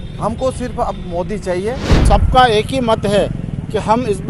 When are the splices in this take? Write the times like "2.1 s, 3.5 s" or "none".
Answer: 2.0 s